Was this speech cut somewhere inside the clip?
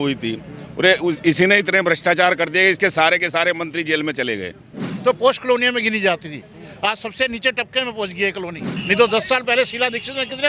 yes; 2 cuts; at 4.9 s, 8.7 s

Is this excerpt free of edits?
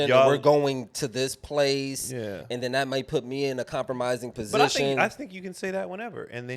yes; 0 cuts

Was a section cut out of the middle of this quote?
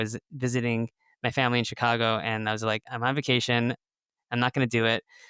yes; 1 cut; at 2.9 s

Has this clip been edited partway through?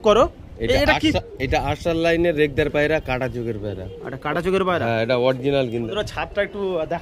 yes; 1 cut; at 5.9 s

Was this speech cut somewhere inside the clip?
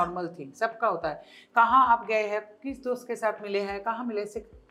no; 0 cuts

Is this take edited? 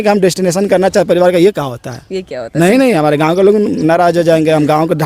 no; 0 cuts

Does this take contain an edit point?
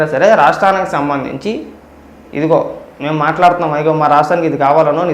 no; 0 cuts

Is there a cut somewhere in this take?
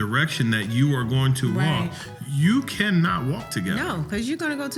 no; 0 cuts

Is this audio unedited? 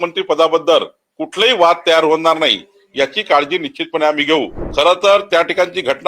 no; 1 cut; at 4.6 s

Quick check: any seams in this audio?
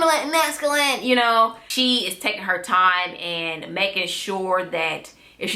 yes; 1 cut; at 1.6 s

